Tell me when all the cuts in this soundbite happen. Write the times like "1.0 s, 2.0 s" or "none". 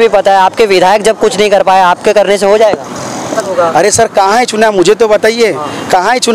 3.5 s